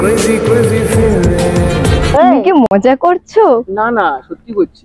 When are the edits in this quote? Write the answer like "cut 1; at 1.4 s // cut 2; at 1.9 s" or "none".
none